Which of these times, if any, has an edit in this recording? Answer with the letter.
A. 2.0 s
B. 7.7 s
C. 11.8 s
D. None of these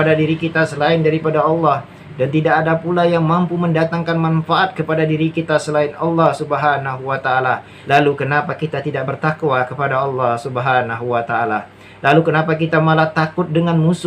B